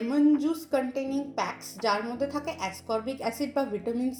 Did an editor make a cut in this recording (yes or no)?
no